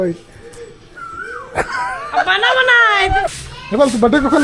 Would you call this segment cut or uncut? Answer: cut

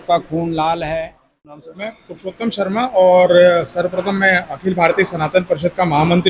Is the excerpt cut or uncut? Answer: cut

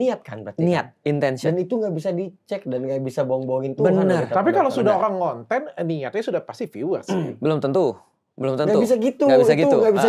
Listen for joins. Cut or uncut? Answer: uncut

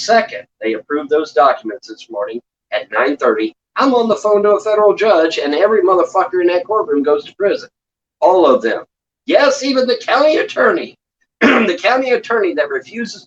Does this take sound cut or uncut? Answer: uncut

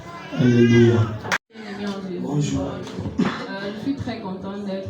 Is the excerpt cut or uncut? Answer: cut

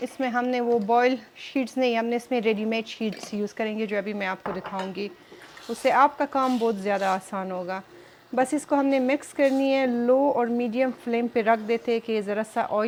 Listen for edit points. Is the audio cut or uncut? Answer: uncut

